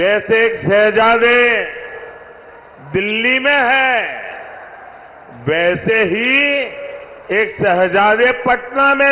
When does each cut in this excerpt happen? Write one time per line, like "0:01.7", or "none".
none